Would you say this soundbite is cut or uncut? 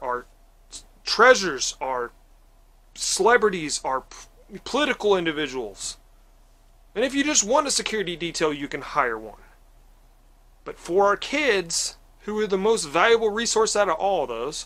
uncut